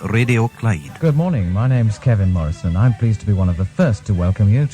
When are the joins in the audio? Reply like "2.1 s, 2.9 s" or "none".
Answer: 0.9 s